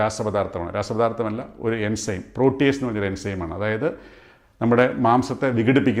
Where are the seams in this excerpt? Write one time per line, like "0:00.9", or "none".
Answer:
none